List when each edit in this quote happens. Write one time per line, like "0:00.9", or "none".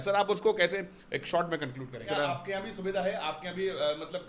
0:02.1